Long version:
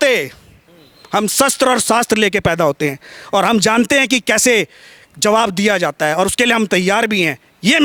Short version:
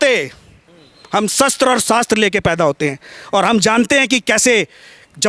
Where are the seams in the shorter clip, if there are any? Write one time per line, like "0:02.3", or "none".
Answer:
none